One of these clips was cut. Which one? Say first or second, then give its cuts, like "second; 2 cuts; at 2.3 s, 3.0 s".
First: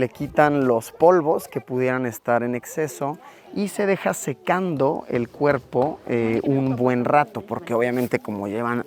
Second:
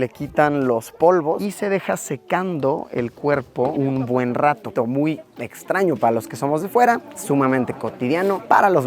second; 3 cuts; at 1.4 s, 3.7 s, 4.7 s